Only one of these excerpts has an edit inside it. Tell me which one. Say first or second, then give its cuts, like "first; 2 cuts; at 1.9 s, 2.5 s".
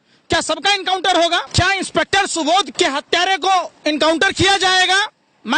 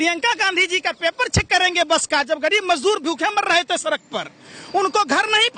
first; 2 cuts; at 1.5 s, 2.7 s